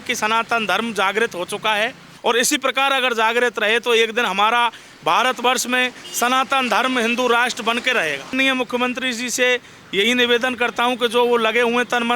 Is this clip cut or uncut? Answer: cut